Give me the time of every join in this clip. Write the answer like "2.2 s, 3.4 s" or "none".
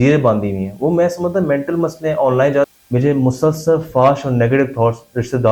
2.7 s